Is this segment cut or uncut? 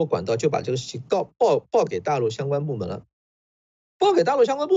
uncut